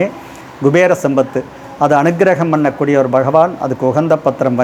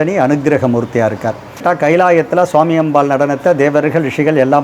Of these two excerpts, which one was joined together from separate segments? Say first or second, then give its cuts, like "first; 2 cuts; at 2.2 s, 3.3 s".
second; 1 cut; at 1.6 s